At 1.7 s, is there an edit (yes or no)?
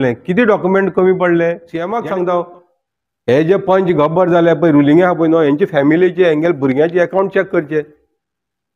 yes